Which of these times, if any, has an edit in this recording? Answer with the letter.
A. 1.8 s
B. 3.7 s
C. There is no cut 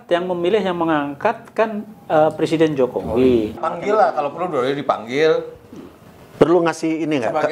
B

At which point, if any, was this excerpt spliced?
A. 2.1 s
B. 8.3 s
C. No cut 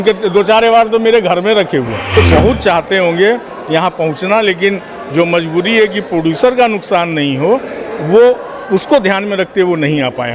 A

